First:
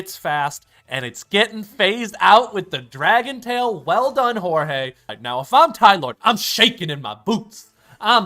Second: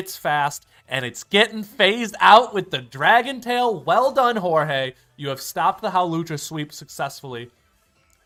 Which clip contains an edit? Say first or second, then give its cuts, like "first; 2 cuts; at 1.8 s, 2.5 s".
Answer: first; 1 cut; at 5.1 s